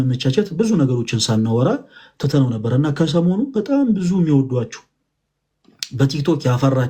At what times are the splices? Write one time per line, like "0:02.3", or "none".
none